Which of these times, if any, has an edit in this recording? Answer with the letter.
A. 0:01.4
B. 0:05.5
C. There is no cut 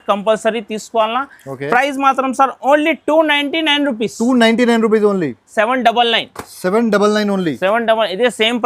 B